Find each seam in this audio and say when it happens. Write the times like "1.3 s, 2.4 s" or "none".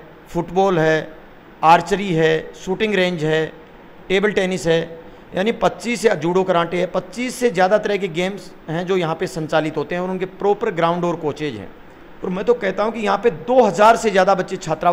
none